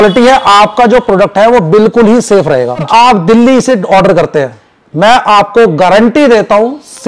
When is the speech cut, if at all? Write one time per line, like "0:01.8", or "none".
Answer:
0:02.9